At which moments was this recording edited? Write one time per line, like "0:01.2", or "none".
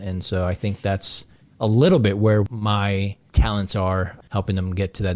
0:02.5
0:04.2